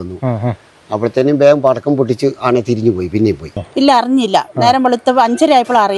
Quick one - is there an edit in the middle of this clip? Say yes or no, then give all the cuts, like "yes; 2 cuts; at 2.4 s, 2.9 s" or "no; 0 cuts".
yes; 1 cut; at 3.6 s